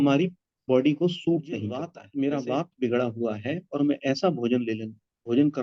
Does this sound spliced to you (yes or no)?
yes